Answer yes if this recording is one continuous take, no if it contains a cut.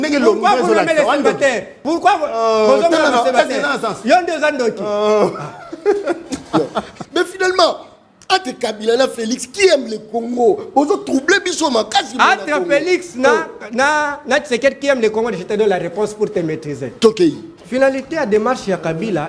no